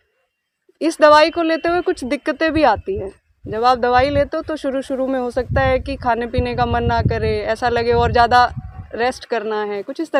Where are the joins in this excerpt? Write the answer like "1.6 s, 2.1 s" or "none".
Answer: none